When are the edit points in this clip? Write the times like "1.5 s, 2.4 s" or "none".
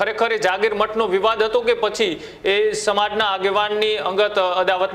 none